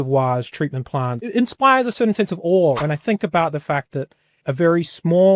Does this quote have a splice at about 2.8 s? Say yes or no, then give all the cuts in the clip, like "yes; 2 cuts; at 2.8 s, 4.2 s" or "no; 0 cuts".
yes; 3 cuts; at 1.3 s, 2.8 s, 4.4 s